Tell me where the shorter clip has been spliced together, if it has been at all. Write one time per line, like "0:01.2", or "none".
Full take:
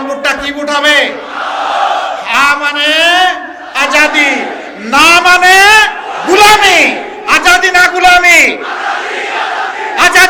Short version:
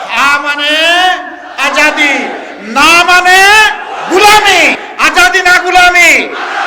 0:04.9